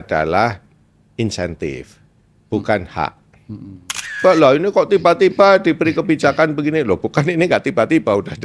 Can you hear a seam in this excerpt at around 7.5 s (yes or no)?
no